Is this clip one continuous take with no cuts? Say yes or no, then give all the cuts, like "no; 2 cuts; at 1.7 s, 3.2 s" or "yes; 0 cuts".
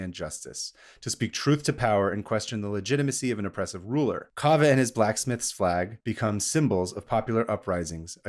no; 1 cut; at 6.0 s